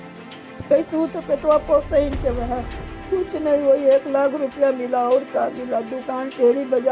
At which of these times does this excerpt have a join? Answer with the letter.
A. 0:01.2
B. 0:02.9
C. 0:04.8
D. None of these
B